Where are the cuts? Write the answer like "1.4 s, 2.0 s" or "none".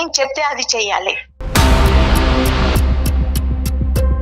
1.3 s